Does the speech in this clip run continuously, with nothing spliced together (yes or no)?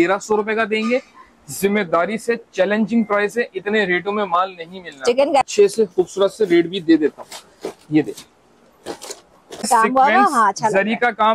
no